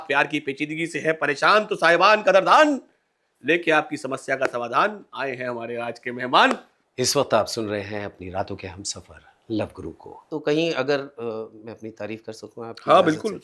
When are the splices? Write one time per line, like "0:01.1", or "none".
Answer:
0:06.8
0:10.1